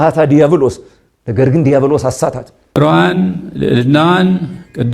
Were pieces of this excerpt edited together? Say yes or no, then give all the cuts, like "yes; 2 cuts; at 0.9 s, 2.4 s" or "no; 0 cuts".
yes; 1 cut; at 2.5 s